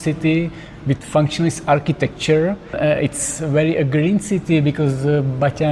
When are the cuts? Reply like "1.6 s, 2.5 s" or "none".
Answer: 2.7 s